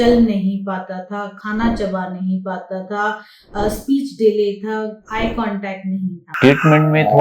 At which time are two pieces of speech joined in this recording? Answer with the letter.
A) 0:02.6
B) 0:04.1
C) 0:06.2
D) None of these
C